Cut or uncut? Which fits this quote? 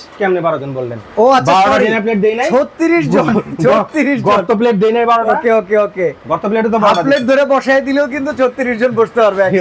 uncut